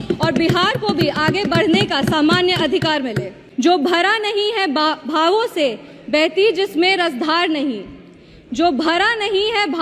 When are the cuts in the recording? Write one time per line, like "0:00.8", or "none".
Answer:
0:03.4